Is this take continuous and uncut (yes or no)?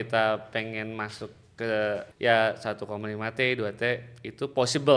no